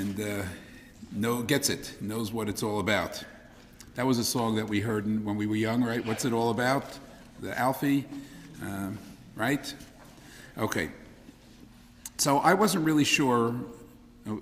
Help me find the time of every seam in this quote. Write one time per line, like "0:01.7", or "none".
0:04.4